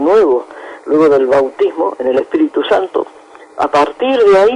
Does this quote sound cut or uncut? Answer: cut